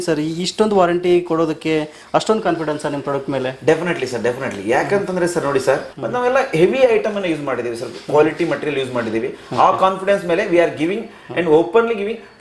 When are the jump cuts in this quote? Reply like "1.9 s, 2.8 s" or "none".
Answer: 5.9 s

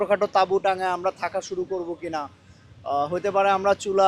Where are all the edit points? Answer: none

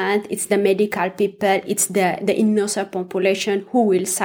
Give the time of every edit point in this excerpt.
none

